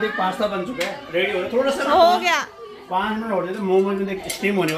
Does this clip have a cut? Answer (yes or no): no